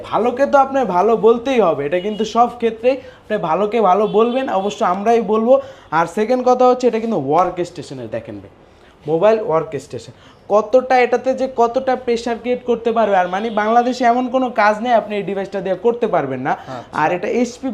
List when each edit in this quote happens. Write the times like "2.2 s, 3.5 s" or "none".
none